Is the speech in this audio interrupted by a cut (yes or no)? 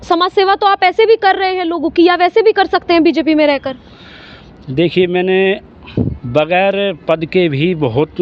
no